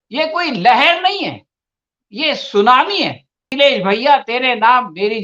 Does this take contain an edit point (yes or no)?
yes